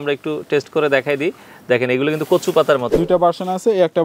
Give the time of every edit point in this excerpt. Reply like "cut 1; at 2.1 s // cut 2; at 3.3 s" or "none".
cut 1; at 2.9 s